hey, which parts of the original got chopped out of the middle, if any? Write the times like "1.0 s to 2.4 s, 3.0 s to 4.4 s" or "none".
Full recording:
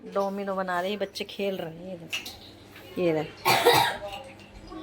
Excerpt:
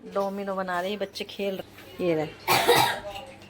1.7 s to 2.7 s